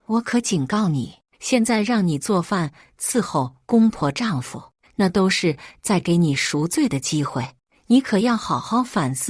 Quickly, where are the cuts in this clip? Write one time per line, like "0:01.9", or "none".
0:01.2

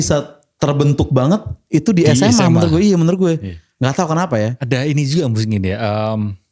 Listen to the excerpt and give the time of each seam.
none

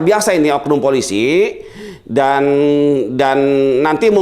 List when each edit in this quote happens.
none

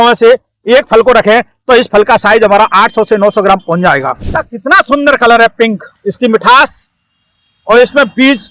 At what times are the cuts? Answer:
0:04.2
0:05.9

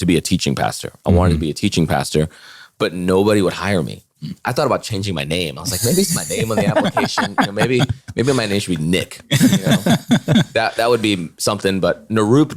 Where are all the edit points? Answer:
none

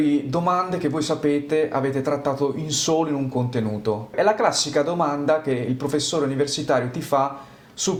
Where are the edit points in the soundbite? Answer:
none

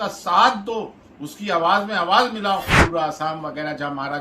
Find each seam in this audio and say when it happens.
0:02.8

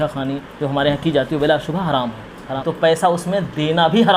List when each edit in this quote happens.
0:02.6

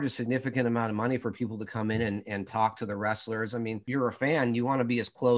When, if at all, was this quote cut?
0:03.8

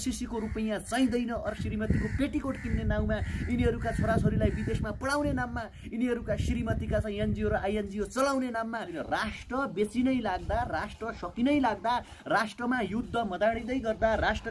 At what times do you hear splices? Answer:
0:01.5
0:08.9

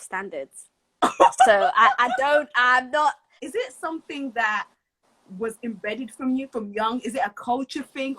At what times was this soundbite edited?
0:03.3

